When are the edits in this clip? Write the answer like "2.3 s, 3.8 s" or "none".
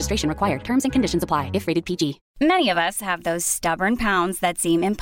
2.2 s

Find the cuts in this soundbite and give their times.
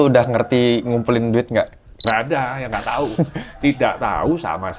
1.9 s

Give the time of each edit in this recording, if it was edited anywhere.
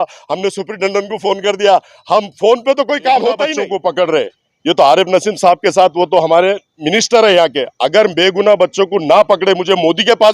3.7 s, 6.7 s

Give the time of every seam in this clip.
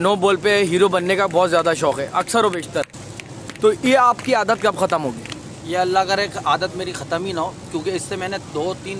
none

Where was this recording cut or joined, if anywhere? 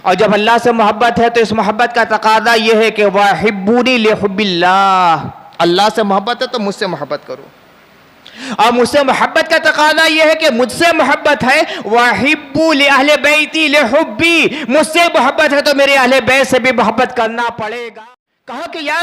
17.7 s

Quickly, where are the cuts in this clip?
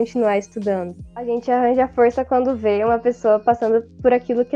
1.1 s

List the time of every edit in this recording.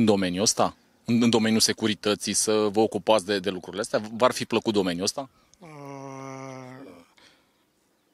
none

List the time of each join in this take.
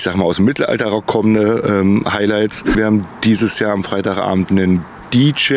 2.7 s

